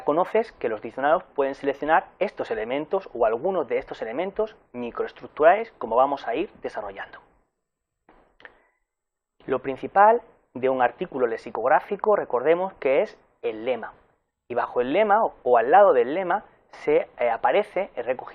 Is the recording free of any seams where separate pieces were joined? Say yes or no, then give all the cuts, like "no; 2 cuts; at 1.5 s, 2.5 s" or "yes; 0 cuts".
no; 1 cut; at 9.6 s